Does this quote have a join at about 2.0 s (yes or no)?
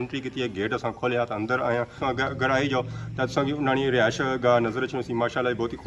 yes